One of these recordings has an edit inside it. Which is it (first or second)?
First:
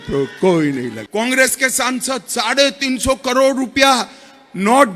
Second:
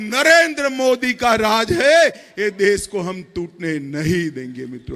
first